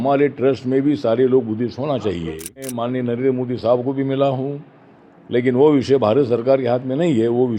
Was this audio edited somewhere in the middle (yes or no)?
yes